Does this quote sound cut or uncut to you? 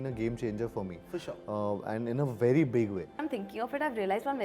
cut